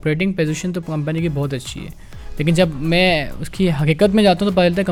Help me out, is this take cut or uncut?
uncut